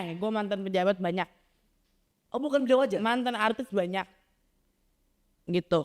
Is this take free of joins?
yes; 0 cuts

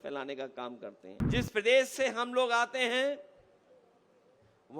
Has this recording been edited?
yes; 1 cut; at 1.0 s

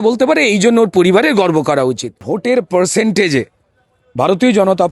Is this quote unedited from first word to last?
no; 1 cut; at 2.3 s

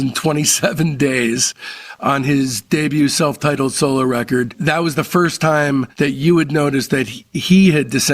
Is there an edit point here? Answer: yes; 2 cuts; at 4.6 s, 5.9 s

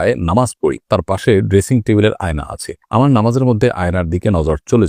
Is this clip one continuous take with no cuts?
yes; 0 cuts

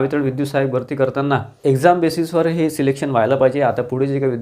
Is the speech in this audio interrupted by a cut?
yes; 1 cut; at 1.5 s

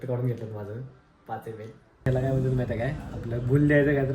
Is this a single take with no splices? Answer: no; 1 cut; at 2.1 s

